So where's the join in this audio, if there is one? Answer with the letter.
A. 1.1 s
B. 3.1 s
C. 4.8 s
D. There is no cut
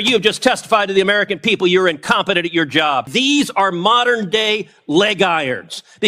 B